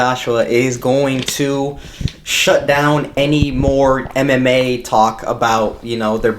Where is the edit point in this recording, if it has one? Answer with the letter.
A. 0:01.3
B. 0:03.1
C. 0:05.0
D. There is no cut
B